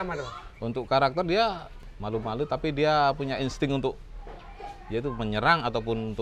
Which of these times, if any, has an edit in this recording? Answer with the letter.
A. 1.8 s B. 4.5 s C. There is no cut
A